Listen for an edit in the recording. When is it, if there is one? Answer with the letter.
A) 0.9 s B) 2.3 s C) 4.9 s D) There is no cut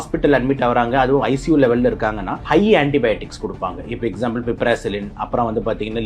B